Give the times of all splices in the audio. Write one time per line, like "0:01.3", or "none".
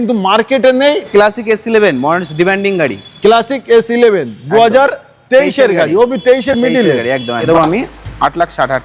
0:01.1
0:07.4